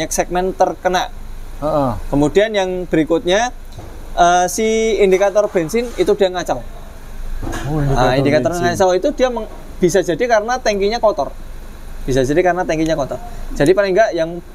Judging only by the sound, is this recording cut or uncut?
uncut